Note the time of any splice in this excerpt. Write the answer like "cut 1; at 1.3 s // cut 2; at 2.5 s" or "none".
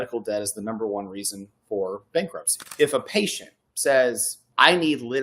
cut 1; at 2.6 s

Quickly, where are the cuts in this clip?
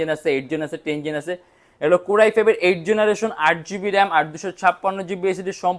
none

